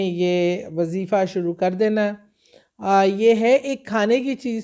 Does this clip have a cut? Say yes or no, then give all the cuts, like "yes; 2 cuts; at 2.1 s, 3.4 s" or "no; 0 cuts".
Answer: no; 0 cuts